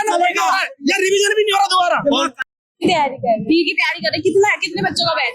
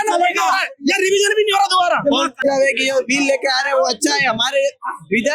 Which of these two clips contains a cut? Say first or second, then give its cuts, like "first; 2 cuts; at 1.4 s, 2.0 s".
second; 1 cut; at 2.4 s